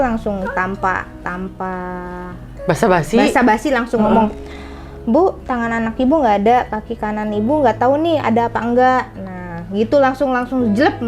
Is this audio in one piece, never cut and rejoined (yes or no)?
yes